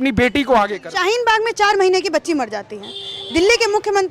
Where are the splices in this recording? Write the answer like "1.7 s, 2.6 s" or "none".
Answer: none